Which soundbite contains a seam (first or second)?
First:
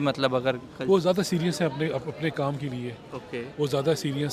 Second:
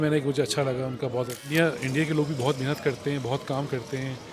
second